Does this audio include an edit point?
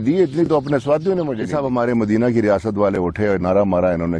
yes; 1 cut; at 1.5 s

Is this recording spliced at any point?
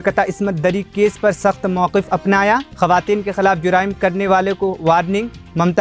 no; 0 cuts

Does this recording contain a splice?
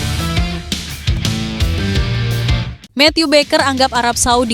yes; 1 cut; at 2.7 s

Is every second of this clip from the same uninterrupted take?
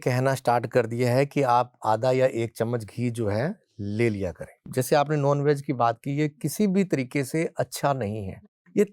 no; 1 cut; at 4.7 s

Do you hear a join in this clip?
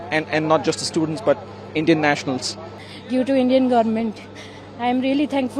yes; 1 cut; at 2.8 s

